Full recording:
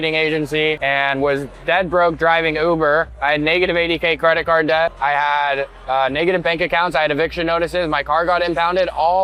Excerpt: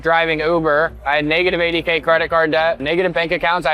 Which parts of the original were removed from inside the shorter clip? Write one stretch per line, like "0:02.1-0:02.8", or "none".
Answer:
0:05.0-0:06.1